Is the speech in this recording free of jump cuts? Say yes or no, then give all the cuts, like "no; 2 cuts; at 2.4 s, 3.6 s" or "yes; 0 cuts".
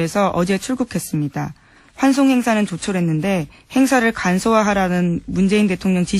no; 1 cut; at 3.9 s